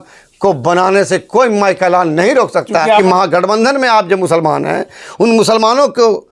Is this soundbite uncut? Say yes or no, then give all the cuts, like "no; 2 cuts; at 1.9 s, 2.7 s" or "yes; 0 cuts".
no; 1 cut; at 3.0 s